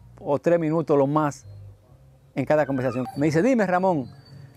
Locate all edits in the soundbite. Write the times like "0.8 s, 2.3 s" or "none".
3.1 s